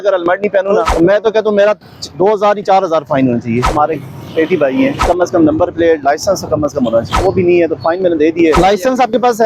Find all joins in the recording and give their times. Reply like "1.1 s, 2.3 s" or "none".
0.9 s, 3.7 s, 5.1 s, 7.1 s, 8.6 s